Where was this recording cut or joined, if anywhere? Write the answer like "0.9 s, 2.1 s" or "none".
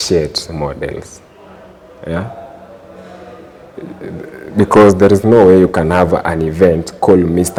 none